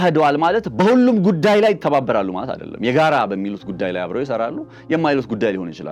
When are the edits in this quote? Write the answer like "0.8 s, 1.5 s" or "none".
none